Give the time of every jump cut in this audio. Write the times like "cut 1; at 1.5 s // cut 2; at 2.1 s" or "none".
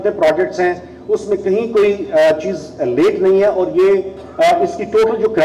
none